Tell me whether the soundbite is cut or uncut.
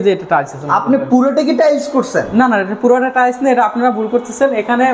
uncut